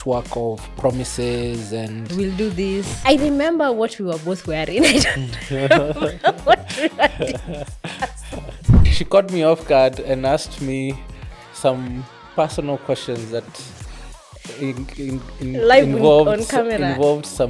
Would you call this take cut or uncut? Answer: cut